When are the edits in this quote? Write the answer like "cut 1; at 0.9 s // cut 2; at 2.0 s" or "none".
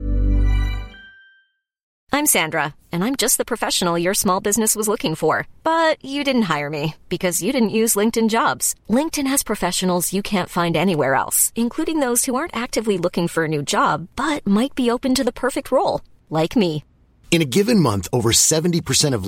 cut 1; at 1.9 s

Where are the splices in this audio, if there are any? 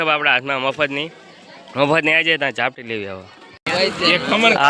cut 1; at 3.7 s

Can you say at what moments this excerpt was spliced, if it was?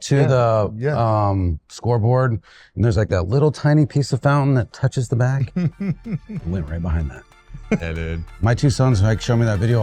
cut 1; at 8.4 s

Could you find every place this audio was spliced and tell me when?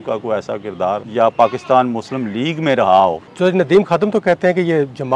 cut 1; at 1.1 s // cut 2; at 3.3 s

